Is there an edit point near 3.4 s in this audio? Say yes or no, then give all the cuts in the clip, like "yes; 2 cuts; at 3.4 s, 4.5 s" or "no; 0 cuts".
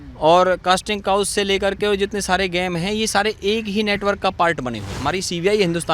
no; 1 cut; at 5.0 s